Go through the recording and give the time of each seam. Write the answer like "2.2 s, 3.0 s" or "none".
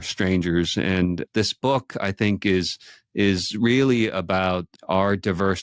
1.2 s, 4.7 s